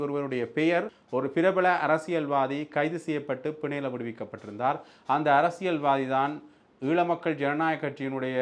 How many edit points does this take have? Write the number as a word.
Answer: one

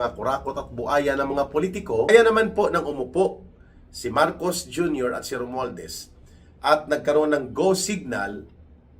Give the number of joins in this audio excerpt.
one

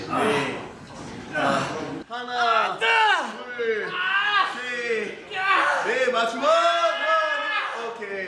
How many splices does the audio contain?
zero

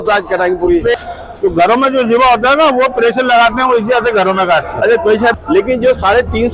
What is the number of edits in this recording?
two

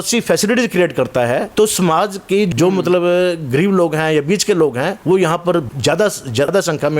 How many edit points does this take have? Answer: four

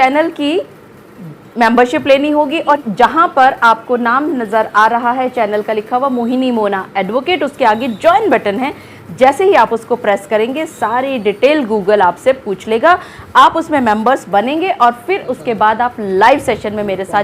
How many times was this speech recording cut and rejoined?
one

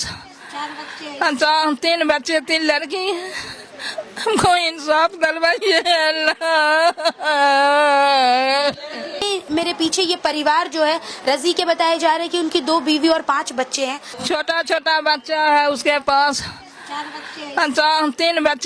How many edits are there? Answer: two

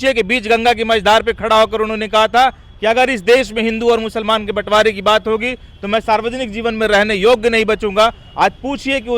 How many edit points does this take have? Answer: zero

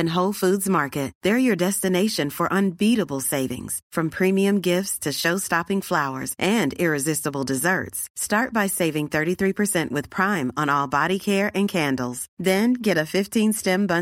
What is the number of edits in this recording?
zero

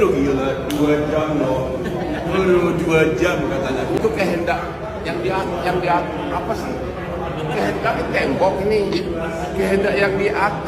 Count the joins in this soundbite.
one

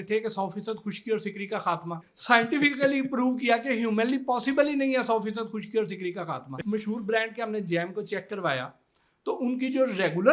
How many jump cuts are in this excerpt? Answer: two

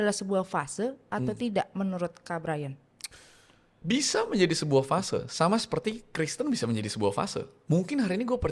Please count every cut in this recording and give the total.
zero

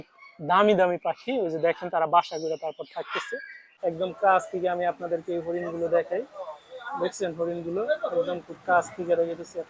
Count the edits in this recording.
one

